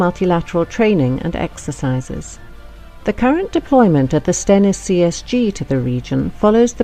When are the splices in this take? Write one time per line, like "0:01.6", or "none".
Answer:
none